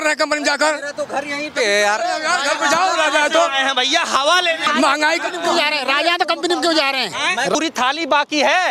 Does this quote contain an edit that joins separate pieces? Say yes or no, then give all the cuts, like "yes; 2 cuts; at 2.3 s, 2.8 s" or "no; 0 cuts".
yes; 1 cut; at 7.5 s